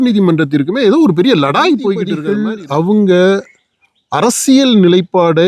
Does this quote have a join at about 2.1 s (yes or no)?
yes